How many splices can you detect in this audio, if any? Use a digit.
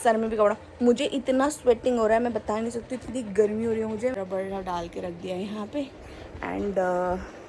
1